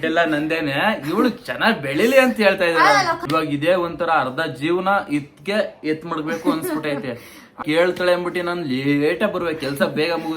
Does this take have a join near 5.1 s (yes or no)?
no